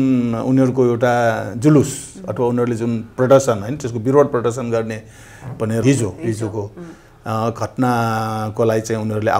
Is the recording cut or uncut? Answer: cut